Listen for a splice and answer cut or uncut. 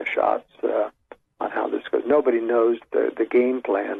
uncut